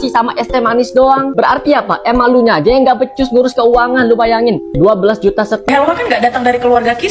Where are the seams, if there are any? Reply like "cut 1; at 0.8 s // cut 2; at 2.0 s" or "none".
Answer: cut 1; at 5.7 s